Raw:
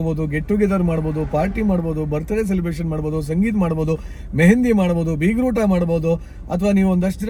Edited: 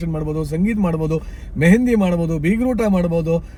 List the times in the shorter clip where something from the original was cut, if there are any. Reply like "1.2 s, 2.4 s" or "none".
none